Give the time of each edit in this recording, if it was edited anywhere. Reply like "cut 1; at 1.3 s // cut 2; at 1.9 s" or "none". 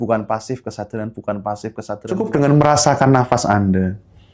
cut 1; at 2.2 s